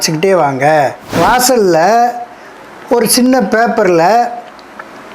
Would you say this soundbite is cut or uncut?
cut